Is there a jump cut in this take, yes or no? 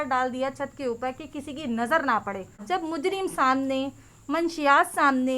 yes